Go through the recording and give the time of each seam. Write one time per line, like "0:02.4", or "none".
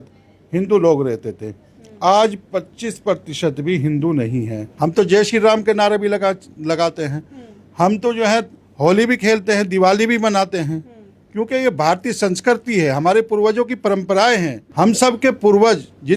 0:04.6
0:14.6